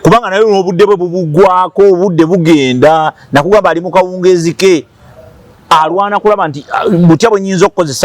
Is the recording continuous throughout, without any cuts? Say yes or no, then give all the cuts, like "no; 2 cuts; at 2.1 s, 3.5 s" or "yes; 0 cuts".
yes; 0 cuts